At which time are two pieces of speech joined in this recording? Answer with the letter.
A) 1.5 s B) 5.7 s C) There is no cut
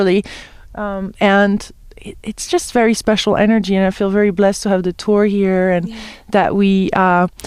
A